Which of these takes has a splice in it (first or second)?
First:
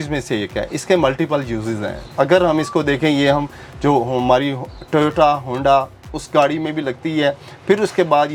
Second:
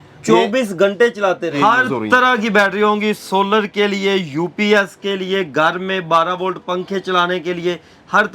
second